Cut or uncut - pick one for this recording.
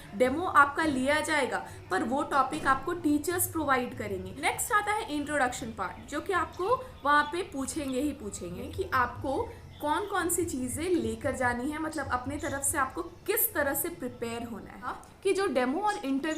cut